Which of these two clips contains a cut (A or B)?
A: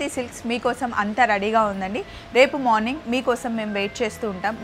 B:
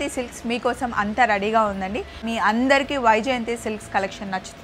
B